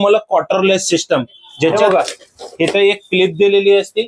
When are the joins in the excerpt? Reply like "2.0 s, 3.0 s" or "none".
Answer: 1.9 s